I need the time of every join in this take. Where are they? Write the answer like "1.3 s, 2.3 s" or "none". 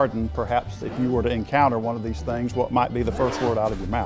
none